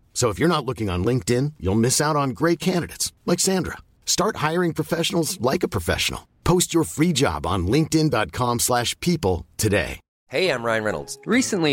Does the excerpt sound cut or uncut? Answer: cut